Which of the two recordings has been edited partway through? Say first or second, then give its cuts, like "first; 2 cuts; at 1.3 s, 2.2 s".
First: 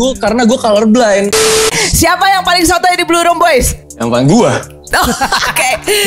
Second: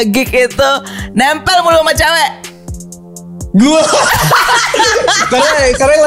first; 2 cuts; at 1.7 s, 3.8 s